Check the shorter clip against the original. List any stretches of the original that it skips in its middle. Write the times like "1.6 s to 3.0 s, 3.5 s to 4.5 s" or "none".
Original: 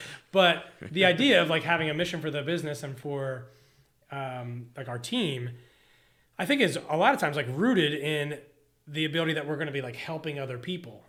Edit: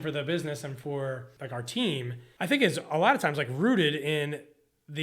3.5 s to 4.7 s, 5.6 s to 6.2 s